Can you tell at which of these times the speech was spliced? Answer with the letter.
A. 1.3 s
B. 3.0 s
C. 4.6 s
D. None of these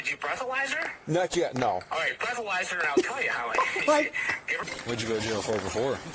C